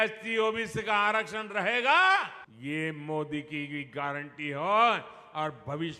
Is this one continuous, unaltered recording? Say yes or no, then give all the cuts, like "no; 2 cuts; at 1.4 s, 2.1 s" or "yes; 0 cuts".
no; 1 cut; at 2.5 s